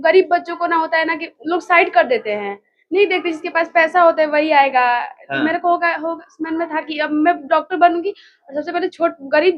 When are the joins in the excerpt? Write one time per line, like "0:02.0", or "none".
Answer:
none